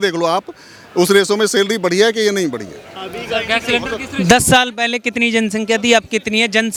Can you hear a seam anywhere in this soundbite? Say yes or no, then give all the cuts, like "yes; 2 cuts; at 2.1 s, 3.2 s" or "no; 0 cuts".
no; 0 cuts